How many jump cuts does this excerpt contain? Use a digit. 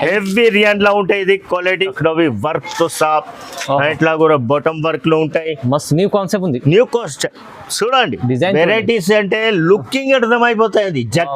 1